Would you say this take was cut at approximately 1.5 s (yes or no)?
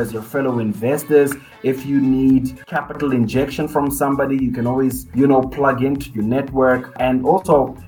no